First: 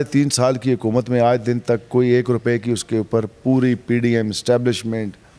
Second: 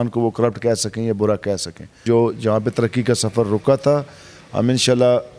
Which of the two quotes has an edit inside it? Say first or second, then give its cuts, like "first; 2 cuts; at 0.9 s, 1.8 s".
second; 1 cut; at 2.0 s